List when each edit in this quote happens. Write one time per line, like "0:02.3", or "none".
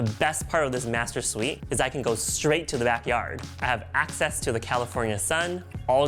0:01.6
0:03.5